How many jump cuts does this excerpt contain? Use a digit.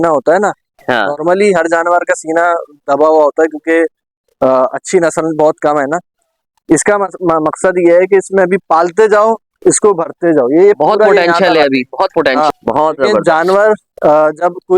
1